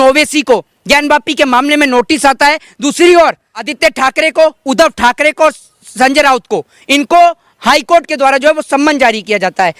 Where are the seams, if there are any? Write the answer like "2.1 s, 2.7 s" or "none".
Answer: 3.7 s